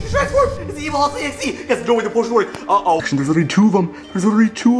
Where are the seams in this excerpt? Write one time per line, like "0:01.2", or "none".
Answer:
0:03.1